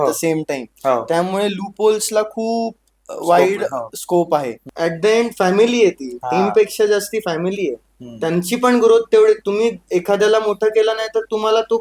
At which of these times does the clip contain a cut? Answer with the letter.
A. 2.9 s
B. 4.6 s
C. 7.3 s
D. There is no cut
B